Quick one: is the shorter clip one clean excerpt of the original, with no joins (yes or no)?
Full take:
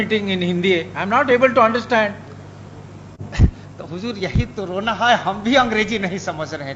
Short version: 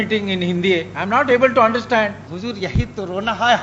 no